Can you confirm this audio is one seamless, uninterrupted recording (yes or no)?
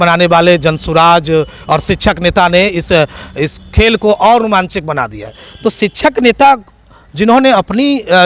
no